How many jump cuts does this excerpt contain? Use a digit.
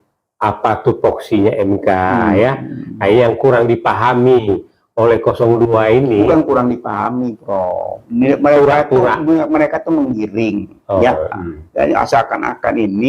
1